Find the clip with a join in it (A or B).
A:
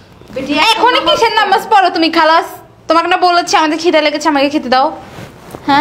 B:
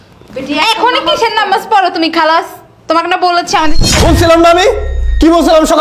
B